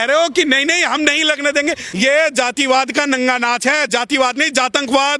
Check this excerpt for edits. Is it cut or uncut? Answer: cut